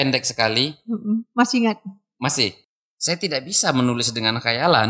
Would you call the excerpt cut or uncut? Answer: cut